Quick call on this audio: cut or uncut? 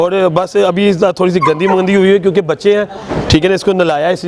uncut